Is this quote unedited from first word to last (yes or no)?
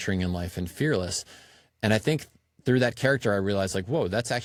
yes